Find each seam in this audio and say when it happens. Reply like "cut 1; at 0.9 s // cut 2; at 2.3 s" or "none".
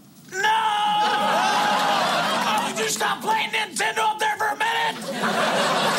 cut 1; at 2.4 s